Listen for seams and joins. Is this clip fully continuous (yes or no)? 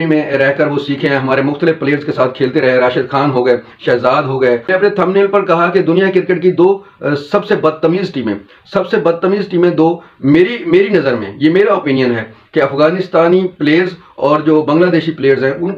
no